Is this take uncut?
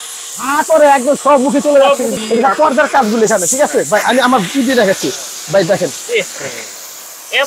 no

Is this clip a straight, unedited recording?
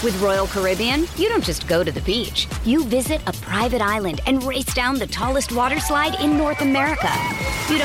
yes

